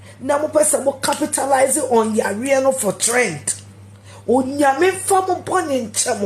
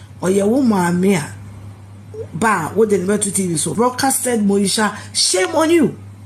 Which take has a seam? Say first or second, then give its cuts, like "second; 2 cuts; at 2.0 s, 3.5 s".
second; 1 cut; at 3.7 s